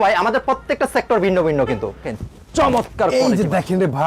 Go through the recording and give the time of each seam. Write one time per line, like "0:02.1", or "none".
0:02.1